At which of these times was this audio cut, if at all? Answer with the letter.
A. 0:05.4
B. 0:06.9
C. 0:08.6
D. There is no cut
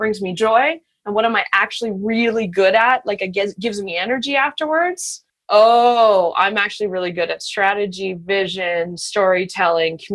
A